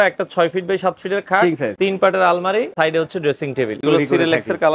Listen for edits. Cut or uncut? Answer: cut